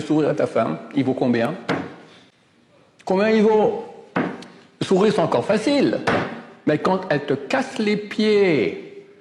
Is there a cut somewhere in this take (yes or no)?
no